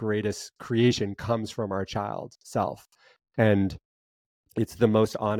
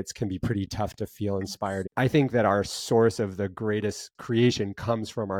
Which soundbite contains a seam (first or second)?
second